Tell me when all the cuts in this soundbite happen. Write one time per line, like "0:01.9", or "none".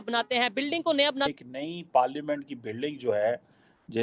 0:01.3